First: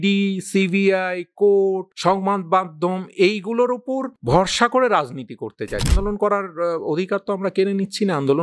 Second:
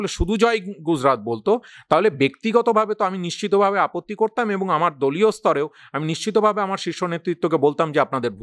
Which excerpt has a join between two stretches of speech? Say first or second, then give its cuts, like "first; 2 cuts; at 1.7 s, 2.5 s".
first; 3 cuts; at 1.9 s, 4.1 s, 5.9 s